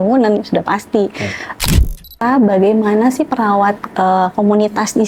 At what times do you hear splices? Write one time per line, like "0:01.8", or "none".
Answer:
0:01.6